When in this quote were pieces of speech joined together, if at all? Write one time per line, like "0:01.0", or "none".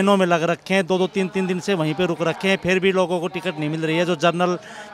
none